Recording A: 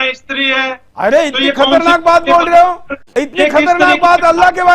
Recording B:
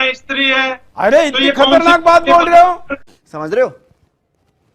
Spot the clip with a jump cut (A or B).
A